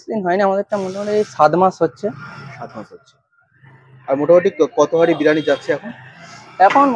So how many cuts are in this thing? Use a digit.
0